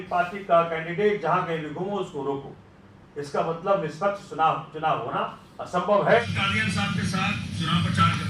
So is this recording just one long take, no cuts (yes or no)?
no